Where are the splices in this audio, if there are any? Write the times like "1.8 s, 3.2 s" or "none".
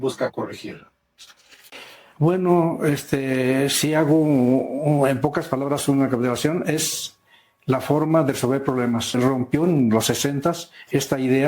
9.1 s